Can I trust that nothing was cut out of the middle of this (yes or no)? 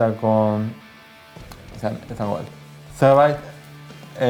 yes